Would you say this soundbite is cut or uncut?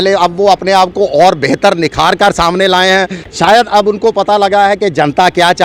uncut